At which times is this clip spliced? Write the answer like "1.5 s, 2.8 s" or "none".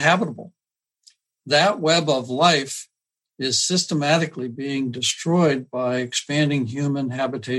1.0 s